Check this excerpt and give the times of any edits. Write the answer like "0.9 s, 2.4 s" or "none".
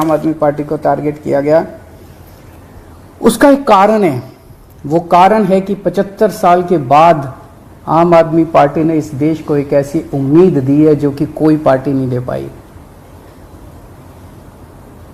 none